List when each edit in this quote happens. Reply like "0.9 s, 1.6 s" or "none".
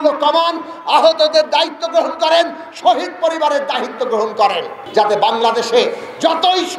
4.8 s